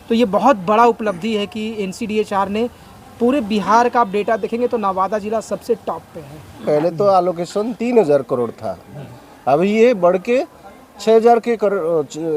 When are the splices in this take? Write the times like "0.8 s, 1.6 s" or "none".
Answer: 6.6 s